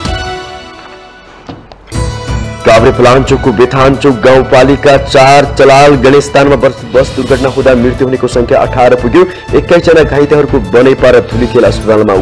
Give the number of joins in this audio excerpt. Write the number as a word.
one